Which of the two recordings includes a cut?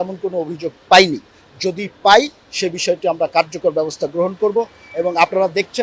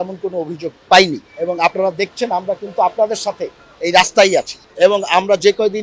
second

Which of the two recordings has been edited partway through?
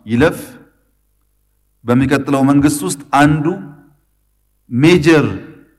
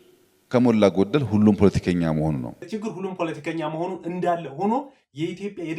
second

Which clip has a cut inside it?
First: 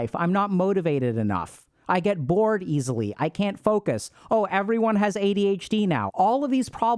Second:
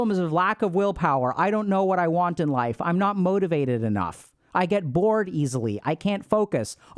first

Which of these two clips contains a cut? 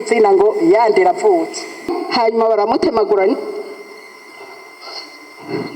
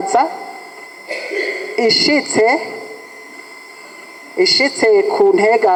first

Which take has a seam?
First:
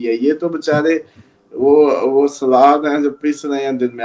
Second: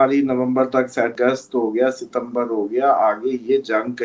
second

